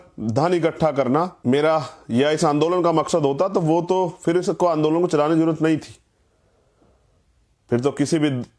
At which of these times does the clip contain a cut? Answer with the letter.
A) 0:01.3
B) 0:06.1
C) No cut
A